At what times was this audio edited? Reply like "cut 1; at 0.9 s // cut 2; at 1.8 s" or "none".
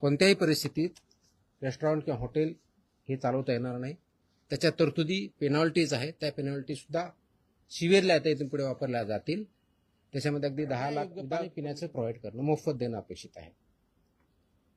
cut 1; at 11.5 s